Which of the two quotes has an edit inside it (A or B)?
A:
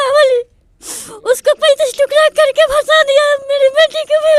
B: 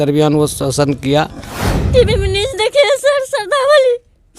B